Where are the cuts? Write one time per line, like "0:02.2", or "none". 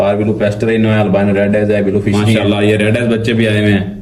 0:02.2